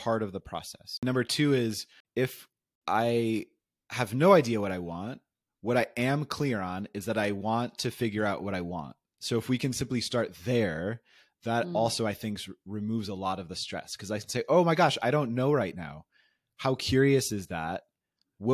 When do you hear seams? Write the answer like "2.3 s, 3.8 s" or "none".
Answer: 0.9 s, 2.4 s